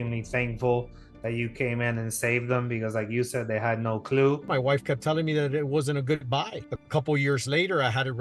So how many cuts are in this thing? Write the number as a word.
two